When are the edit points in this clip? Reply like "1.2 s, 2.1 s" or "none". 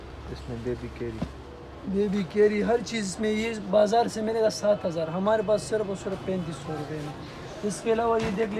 none